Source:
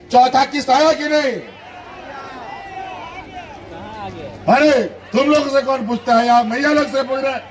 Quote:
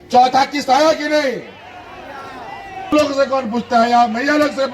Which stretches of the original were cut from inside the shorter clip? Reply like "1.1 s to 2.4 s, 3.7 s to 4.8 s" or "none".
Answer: 2.9 s to 5.3 s

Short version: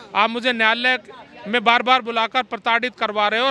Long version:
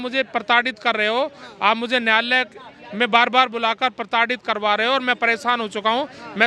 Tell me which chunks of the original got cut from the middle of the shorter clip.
none

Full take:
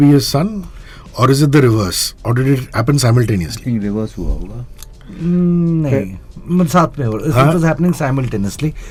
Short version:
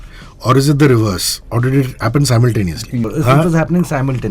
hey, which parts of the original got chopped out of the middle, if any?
3.8 s to 7.2 s

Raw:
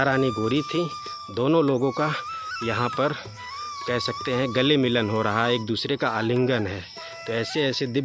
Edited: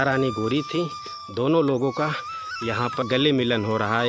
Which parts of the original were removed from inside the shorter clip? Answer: 3.0 s to 4.5 s

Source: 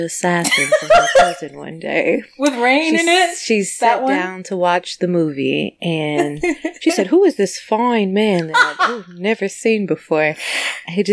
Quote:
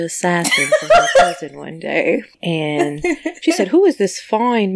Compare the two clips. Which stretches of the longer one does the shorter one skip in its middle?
2.3 s to 5.7 s

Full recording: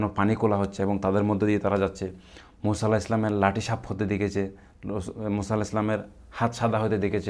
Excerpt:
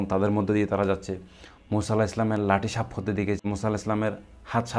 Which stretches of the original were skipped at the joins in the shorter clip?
4.3 s to 5.3 s

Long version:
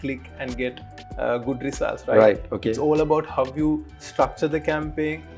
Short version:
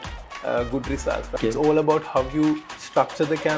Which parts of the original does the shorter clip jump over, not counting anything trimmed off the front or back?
2.0 s to 2.5 s

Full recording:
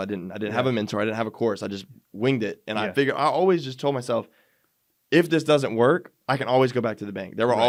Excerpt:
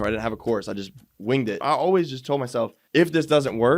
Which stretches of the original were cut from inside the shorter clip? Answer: 2.6 s to 3.2 s, 4.3 s to 5.0 s

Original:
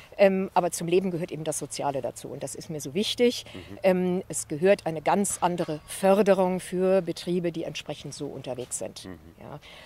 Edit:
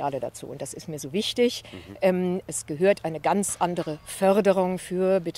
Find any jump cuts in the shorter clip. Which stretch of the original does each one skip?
none

